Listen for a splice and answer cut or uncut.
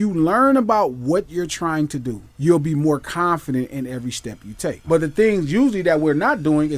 cut